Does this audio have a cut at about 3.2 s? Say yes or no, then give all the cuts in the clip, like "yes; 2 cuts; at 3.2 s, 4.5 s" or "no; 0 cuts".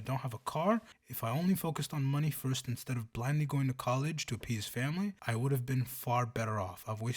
no; 2 cuts; at 1.0 s, 5.2 s